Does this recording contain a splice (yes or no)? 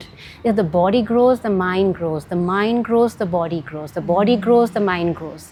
no